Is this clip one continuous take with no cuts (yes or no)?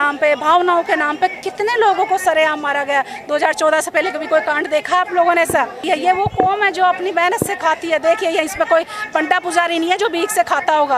no